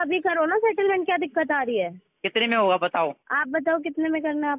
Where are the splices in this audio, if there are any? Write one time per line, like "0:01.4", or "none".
0:03.3